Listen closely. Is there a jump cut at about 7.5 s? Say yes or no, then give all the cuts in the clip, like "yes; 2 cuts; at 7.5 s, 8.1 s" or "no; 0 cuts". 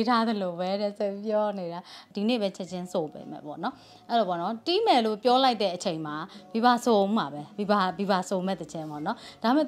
no; 1 cut; at 2.0 s